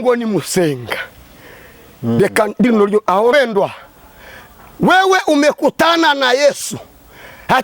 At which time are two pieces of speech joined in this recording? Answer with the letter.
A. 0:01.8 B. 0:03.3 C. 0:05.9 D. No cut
B